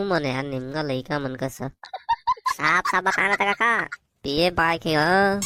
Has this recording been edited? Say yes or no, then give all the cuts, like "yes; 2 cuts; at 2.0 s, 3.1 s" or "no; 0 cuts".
no; 0 cuts